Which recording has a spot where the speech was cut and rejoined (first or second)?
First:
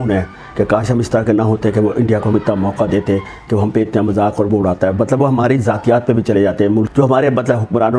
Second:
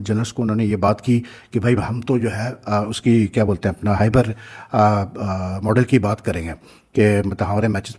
first